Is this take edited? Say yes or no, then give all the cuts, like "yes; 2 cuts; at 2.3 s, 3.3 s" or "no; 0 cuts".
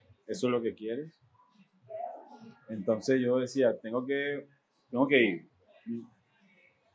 no; 0 cuts